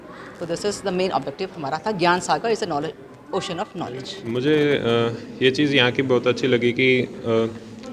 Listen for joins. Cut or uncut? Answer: cut